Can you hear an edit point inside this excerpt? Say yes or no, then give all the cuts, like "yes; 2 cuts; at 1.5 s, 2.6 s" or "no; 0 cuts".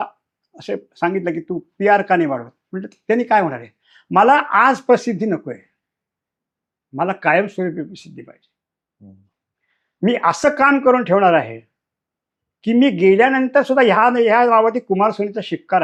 no; 0 cuts